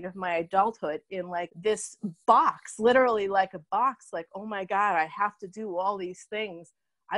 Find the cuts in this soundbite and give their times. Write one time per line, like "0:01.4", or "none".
none